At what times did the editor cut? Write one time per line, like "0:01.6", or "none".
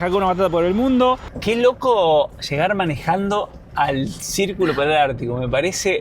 0:01.3